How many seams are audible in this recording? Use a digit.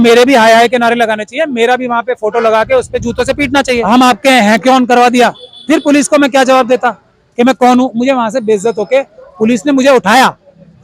1